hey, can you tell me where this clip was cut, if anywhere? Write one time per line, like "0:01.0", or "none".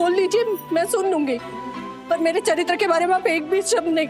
none

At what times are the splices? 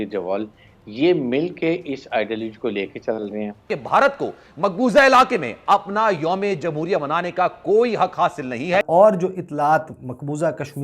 0:03.7
0:08.9

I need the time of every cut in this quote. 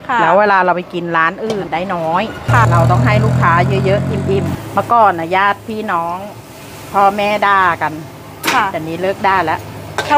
0:01.7
0:02.6
0:04.6

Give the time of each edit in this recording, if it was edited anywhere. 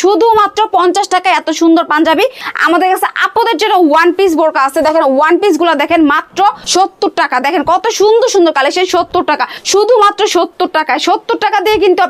0:02.4
0:06.6
0:09.5

